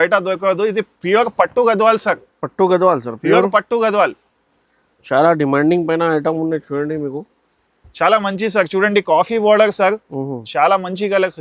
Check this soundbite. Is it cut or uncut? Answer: uncut